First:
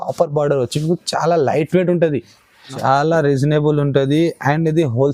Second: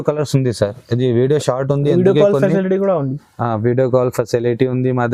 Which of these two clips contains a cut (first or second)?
first